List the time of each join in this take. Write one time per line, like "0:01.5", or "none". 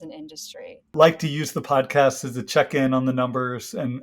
0:00.9